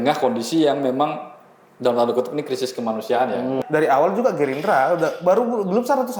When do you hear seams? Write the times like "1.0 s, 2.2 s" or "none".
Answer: 3.6 s